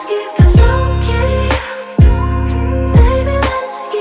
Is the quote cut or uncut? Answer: uncut